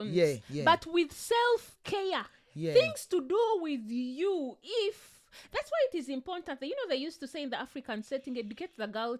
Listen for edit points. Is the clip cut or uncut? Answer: uncut